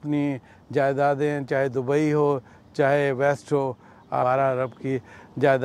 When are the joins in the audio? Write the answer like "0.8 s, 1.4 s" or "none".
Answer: 4.2 s